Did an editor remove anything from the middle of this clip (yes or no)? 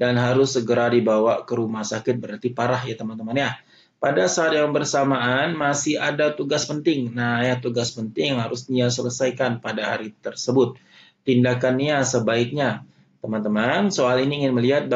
no